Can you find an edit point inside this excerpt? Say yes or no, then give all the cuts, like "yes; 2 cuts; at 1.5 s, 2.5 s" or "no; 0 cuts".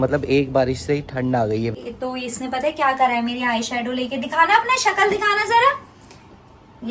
yes; 1 cut; at 1.7 s